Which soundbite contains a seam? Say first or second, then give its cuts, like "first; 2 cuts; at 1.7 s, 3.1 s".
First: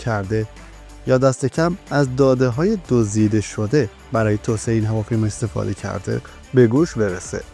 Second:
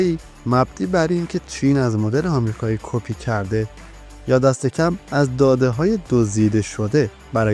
first; 1 cut; at 6.4 s